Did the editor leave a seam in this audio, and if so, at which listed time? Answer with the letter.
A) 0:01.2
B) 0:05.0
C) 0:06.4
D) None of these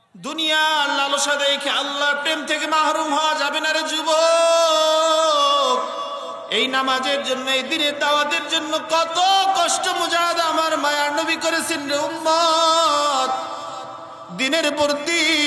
C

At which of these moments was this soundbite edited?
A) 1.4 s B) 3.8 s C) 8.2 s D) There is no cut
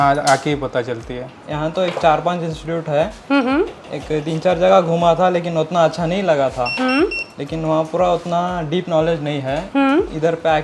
A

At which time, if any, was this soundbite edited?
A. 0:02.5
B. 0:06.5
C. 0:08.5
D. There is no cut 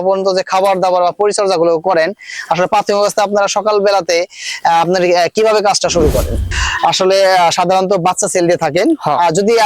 B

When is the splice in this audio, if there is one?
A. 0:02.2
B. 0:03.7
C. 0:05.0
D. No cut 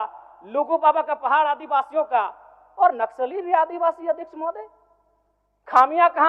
D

